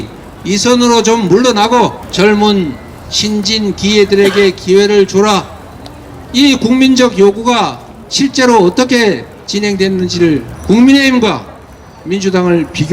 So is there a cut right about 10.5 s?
yes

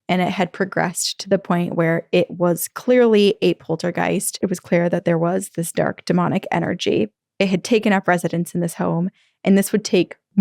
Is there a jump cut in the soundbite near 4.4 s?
yes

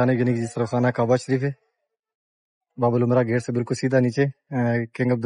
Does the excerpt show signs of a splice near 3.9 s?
no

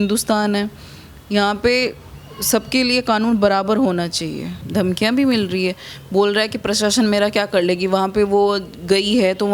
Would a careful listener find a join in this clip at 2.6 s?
no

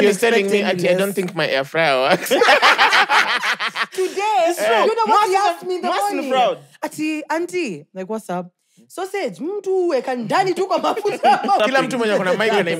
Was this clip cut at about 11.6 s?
yes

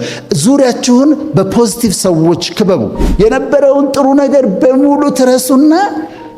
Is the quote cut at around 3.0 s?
yes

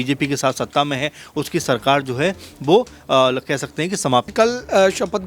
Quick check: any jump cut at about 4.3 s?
yes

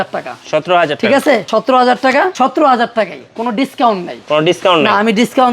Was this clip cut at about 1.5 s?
yes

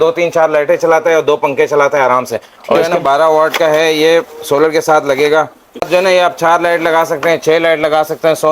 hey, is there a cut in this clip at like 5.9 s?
yes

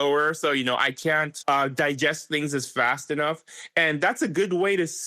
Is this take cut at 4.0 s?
no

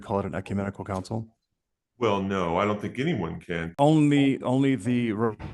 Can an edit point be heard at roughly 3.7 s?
yes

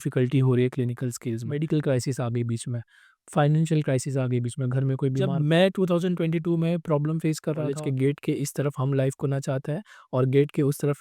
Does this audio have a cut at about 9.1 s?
no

